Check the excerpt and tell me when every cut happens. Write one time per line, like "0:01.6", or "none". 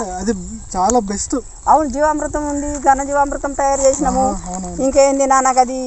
none